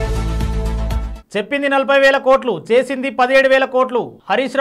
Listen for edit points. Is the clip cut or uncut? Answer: uncut